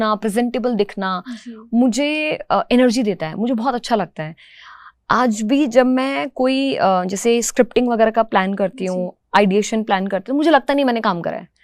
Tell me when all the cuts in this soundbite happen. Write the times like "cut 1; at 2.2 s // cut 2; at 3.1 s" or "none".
none